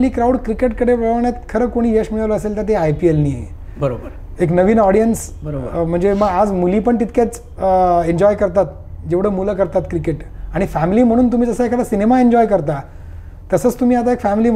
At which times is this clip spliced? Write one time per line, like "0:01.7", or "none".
none